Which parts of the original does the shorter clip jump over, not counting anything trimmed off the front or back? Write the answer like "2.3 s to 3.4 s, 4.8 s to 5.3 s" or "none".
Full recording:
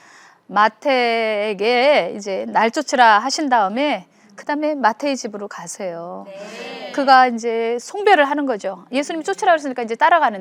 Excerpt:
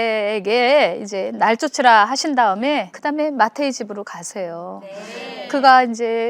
4.1 s to 4.4 s

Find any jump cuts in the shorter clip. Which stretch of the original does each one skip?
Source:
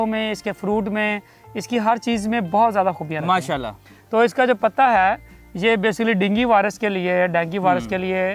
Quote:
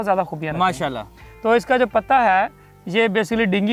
none

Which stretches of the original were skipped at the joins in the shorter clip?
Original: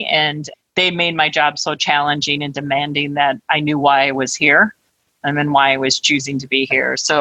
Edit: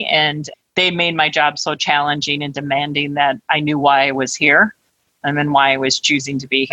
none

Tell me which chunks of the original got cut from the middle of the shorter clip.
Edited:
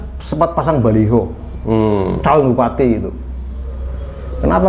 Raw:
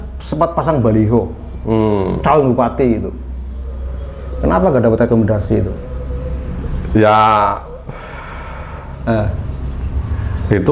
none

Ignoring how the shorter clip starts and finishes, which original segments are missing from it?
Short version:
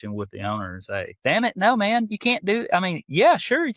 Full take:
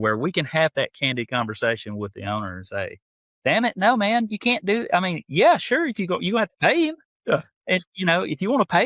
3.0 s to 3.3 s

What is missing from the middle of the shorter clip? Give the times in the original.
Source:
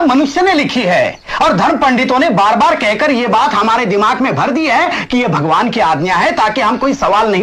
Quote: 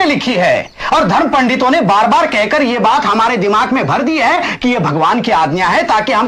none

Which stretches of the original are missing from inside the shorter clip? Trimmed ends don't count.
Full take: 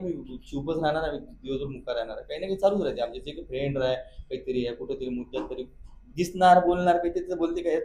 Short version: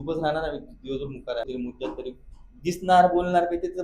2.1 s to 5.0 s

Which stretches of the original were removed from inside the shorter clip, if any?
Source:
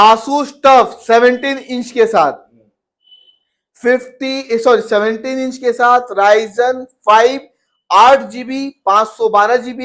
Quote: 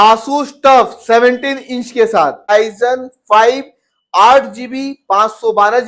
2.5 s to 6.3 s

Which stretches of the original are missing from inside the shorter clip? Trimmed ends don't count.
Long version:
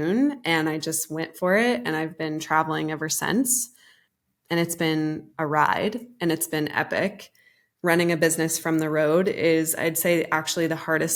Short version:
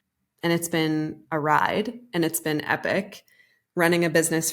none

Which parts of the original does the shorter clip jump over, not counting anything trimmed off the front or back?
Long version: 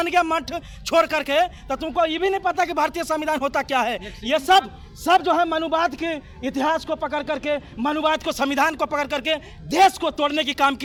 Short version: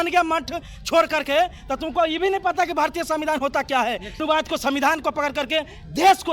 4.2 s to 8.0 s

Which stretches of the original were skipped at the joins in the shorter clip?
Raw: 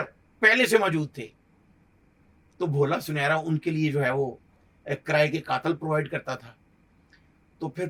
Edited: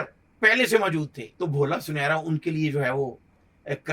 1.2 s to 2.4 s

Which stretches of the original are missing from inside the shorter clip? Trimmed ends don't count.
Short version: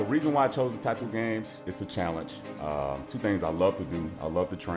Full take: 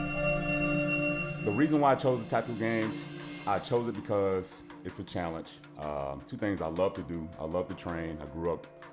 3.1 s to 4.8 s

